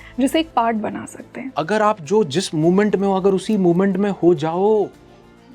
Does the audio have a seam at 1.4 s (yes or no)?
yes